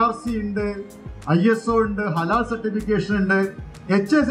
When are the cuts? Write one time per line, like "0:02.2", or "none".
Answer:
none